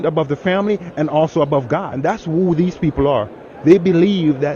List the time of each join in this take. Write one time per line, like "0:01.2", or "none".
0:01.9